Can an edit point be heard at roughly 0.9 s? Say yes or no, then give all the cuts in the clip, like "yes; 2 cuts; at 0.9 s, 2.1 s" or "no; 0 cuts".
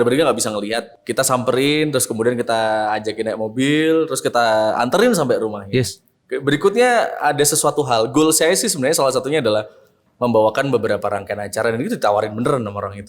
yes; 1 cut; at 0.9 s